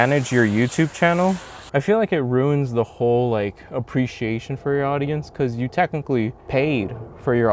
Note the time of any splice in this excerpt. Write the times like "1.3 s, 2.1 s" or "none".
1.5 s, 6.4 s